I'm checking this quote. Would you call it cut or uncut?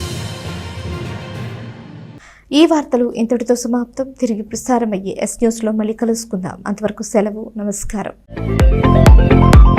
uncut